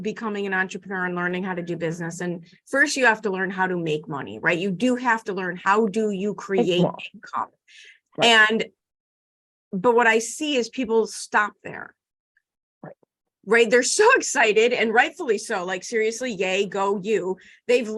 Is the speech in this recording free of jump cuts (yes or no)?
yes